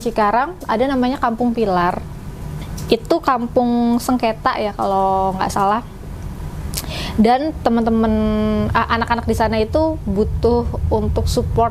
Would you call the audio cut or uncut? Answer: uncut